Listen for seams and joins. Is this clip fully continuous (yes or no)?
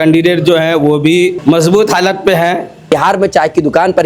no